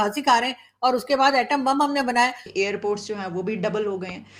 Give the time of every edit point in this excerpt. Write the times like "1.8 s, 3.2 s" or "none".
2.4 s